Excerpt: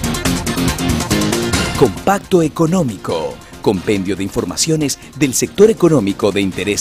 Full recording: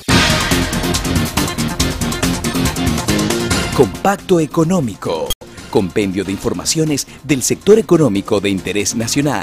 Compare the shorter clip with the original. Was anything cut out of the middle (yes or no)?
yes